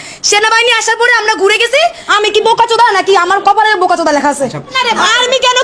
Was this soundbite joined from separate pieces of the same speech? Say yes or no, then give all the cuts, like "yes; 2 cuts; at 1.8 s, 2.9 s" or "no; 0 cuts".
yes; 2 cuts; at 2.0 s, 4.7 s